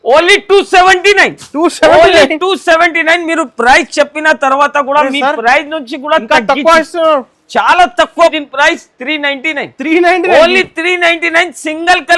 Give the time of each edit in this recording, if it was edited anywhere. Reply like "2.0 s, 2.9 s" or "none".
8.3 s